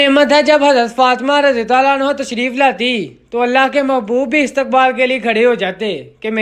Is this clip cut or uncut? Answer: uncut